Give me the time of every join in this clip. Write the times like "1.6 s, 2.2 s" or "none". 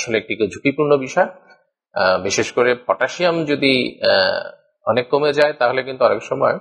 none